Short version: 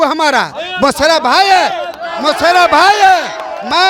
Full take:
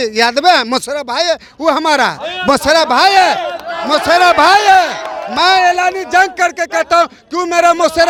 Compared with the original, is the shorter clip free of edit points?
yes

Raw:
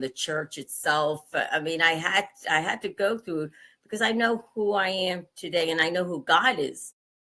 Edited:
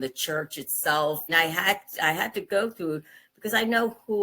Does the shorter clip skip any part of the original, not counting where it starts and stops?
yes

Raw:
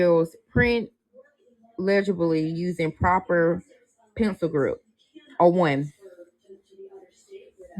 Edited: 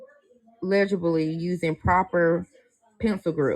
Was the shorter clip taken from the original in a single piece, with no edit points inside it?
yes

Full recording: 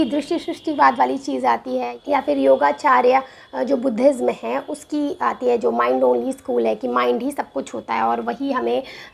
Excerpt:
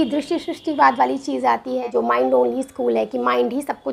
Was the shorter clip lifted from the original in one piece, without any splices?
no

